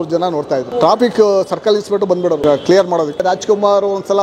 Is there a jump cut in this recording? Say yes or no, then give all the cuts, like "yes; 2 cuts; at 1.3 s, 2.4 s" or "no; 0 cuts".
yes; 3 cuts; at 0.8 s, 2.4 s, 3.2 s